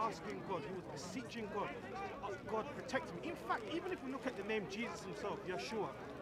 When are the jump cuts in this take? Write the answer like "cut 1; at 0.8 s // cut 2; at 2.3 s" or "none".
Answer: none